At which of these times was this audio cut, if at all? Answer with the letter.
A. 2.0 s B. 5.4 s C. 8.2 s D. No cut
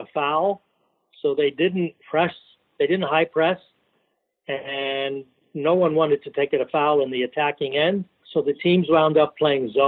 C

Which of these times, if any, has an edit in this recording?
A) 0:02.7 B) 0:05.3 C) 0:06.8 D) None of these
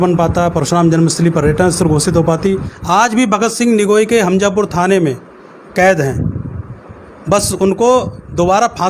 A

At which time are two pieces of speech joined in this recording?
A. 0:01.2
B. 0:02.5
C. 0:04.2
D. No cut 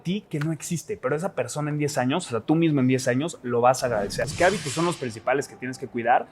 C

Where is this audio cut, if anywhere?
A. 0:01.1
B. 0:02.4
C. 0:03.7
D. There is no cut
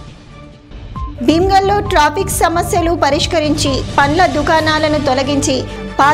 A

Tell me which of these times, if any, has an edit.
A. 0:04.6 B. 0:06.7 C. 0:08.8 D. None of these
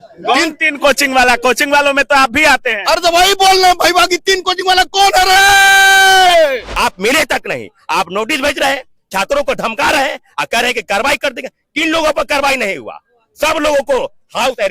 B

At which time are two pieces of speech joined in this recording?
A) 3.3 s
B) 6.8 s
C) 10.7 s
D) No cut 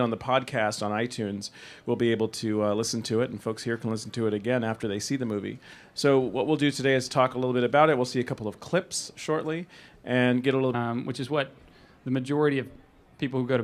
D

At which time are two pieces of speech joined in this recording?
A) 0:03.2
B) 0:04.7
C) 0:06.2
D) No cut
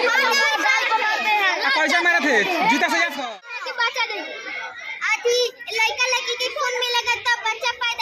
A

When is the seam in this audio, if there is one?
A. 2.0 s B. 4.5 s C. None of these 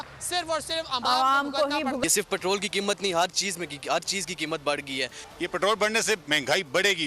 A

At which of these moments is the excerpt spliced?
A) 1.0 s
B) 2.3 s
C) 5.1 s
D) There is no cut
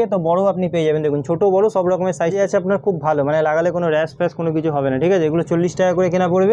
B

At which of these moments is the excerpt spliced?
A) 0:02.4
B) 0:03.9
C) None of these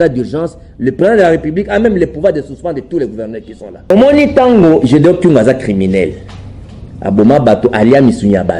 B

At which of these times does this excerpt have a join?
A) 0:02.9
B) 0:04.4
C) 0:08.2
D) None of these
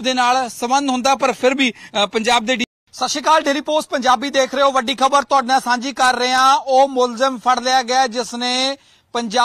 A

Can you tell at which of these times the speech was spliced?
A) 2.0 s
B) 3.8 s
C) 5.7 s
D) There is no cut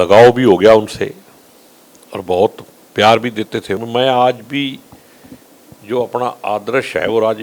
B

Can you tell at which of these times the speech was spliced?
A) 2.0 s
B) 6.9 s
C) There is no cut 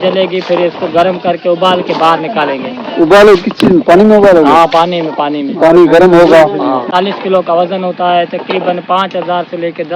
B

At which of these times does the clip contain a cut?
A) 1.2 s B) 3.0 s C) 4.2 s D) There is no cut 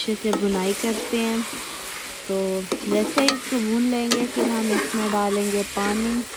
D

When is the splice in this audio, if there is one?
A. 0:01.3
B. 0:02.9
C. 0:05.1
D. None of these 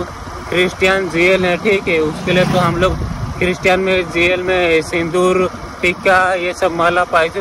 D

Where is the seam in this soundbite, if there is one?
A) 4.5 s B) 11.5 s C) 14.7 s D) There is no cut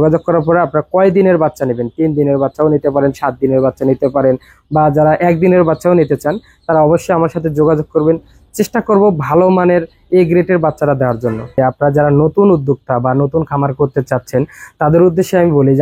B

